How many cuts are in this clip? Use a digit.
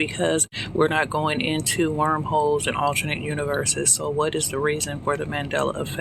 0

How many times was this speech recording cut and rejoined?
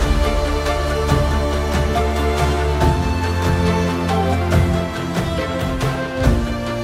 0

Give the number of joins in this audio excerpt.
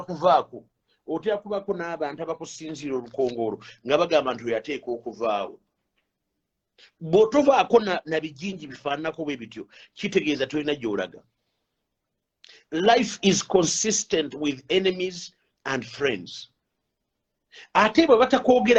0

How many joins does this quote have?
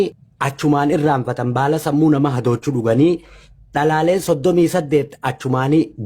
0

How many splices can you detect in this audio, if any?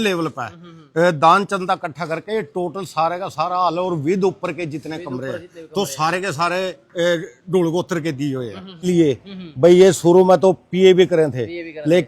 1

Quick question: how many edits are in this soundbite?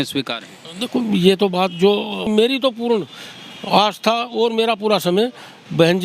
1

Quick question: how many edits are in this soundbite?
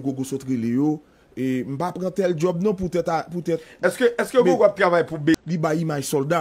1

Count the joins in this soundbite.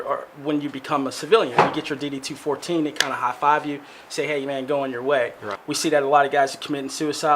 1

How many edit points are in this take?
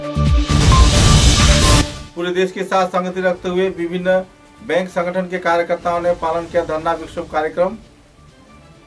1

